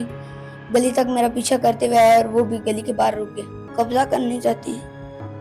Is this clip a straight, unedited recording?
no; 1 cut; at 3.6 s

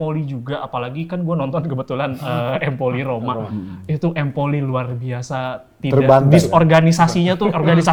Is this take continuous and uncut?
yes; 0 cuts

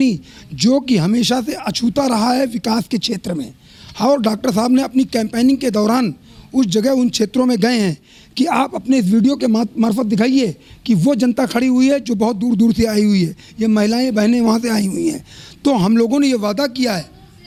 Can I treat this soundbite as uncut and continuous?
yes; 0 cuts

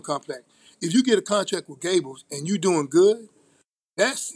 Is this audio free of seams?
yes; 0 cuts

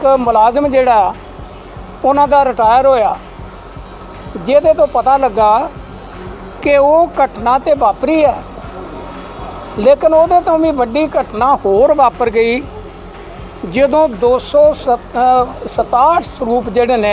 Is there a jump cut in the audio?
no; 0 cuts

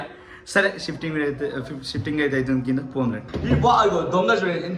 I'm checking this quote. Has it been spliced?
yes; 1 cut; at 3.3 s

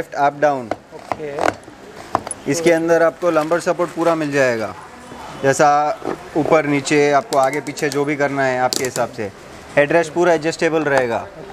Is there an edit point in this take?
no; 0 cuts

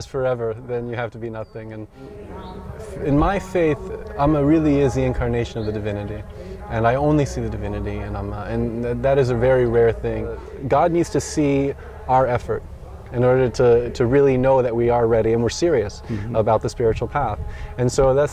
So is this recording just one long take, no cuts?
no; 2 cuts; at 2.2 s, 10.5 s

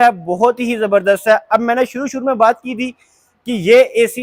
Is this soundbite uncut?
yes; 0 cuts

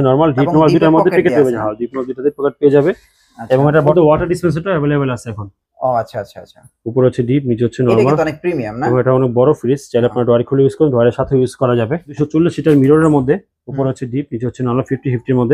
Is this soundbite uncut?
no; 2 cuts; at 3.9 s, 12.1 s

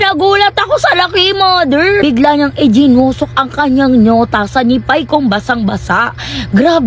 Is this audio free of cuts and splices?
no; 1 cut; at 2.0 s

